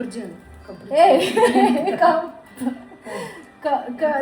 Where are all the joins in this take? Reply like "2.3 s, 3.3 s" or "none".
none